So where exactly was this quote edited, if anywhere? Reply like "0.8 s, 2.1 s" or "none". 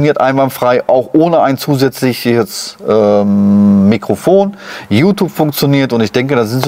none